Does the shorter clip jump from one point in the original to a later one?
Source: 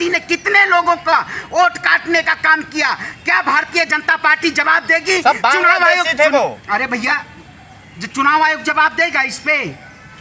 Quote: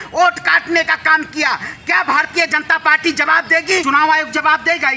yes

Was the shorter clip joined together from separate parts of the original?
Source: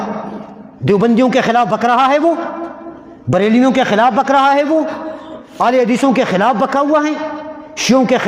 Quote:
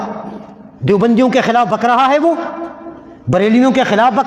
no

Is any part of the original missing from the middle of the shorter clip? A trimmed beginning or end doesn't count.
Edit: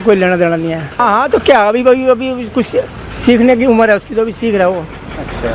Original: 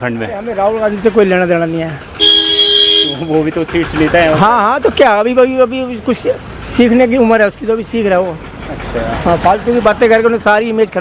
yes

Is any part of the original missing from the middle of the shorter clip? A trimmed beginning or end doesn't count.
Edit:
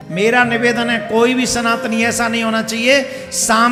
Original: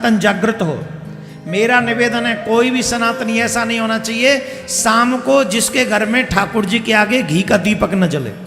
no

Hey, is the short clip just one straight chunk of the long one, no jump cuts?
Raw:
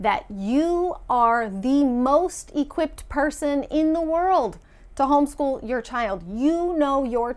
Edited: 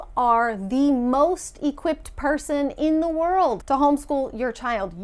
no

